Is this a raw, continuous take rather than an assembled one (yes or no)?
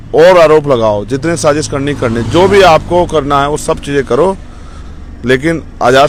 yes